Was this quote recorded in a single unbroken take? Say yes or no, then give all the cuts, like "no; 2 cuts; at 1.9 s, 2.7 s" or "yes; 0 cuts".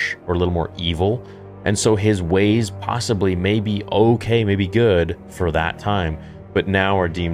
yes; 0 cuts